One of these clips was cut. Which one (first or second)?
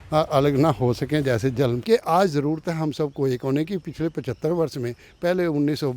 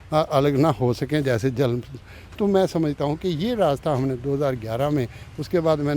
first